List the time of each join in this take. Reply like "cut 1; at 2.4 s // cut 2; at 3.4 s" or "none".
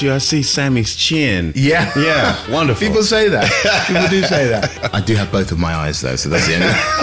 cut 1; at 4.7 s